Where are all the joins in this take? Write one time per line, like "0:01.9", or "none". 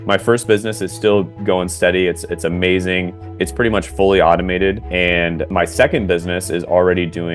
0:05.1